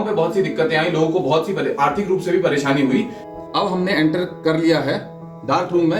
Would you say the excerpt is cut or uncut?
cut